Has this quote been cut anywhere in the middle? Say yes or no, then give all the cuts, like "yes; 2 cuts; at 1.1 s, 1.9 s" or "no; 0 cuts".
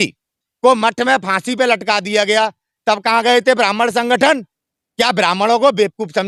no; 0 cuts